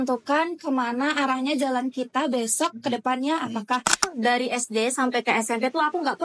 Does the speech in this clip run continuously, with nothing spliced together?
no; 1 cut; at 4.1 s

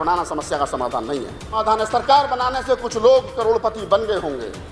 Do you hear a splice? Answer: yes; 1 cut; at 1.5 s

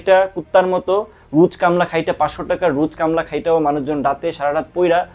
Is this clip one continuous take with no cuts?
yes; 0 cuts

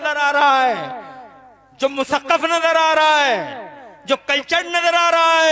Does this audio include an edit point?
no; 0 cuts

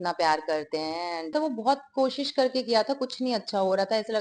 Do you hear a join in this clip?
yes; 1 cut; at 1.3 s

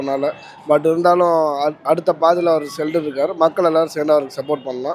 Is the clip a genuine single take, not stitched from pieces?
yes; 0 cuts

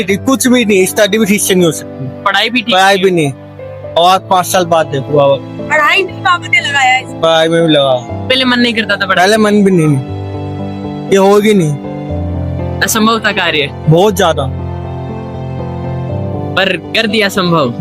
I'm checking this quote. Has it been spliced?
no; 0 cuts

